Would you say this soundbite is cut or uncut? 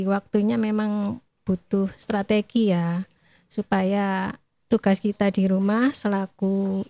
uncut